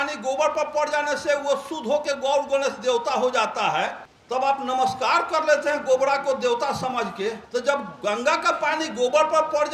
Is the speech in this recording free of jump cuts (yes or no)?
no